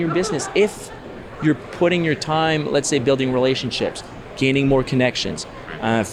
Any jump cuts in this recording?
no; 0 cuts

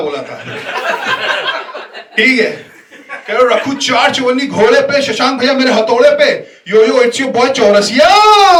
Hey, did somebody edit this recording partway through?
no; 0 cuts

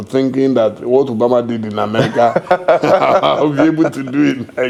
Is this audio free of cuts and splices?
yes; 0 cuts

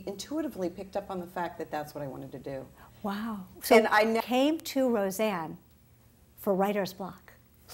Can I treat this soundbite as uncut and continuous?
yes; 0 cuts

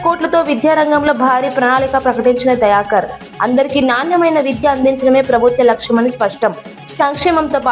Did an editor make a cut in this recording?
no; 0 cuts

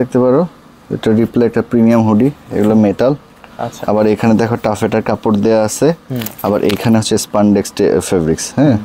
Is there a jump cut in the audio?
no; 0 cuts

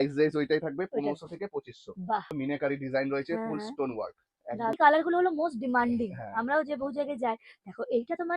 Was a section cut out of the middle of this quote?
yes; 2 cuts; at 2.3 s, 4.8 s

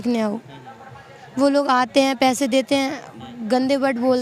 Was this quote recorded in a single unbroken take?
yes; 0 cuts

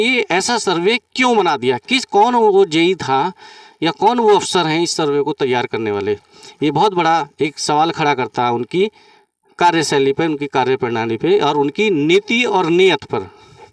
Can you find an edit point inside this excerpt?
no; 0 cuts

